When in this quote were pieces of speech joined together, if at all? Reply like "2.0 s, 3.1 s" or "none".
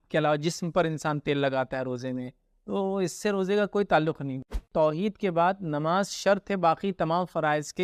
4.5 s